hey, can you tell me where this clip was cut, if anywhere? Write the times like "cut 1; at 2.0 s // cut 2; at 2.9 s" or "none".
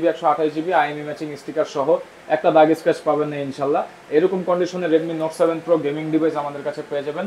none

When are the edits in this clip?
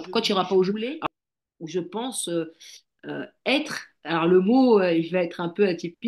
cut 1; at 0.9 s

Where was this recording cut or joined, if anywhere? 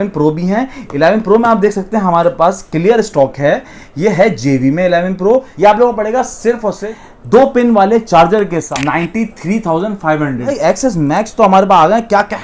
cut 1; at 5.5 s // cut 2; at 6.9 s // cut 3; at 8.7 s // cut 4; at 10.5 s

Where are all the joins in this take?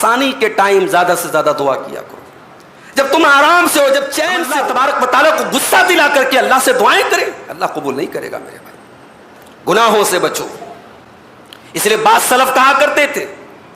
cut 1; at 4.4 s

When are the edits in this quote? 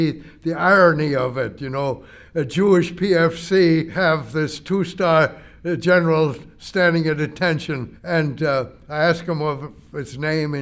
cut 1; at 3.9 s // cut 2; at 7.9 s

